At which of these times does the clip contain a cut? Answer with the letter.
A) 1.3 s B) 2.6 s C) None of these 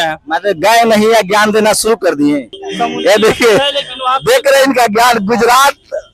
B